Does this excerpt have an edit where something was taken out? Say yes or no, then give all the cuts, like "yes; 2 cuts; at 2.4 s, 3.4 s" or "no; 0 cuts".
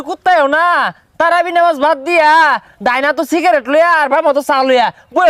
no; 0 cuts